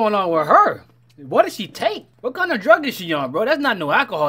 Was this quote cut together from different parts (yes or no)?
yes